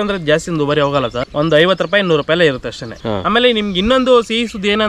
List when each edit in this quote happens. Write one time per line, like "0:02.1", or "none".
0:01.2
0:02.9